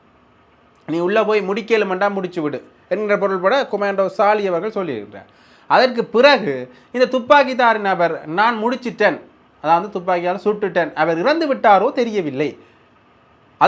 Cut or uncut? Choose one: uncut